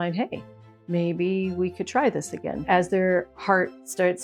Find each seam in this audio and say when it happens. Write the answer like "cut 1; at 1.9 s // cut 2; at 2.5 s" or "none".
cut 1; at 2.7 s